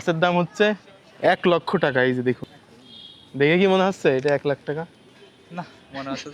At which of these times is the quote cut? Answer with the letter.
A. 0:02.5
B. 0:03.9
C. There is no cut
A